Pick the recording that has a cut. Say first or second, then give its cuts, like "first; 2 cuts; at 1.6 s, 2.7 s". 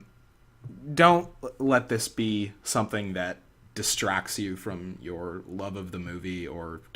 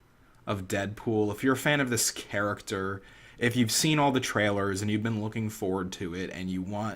second; 1 cut; at 5.0 s